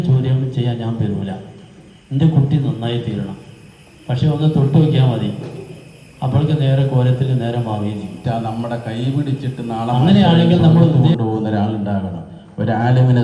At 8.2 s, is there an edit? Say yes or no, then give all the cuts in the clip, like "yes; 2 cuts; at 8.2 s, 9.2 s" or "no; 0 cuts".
yes; 3 cuts; at 8.2 s, 10.0 s, 11.1 s